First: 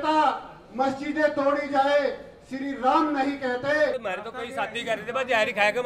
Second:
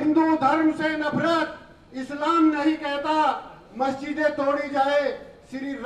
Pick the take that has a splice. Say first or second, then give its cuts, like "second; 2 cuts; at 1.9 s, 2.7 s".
first; 1 cut; at 4.0 s